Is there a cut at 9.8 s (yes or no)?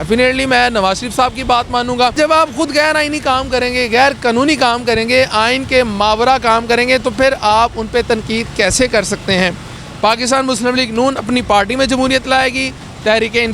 yes